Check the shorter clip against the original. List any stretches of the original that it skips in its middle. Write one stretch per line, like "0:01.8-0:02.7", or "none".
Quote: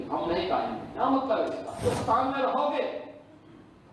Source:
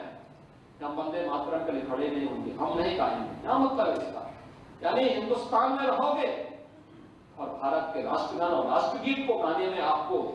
0:04.3-0:05.2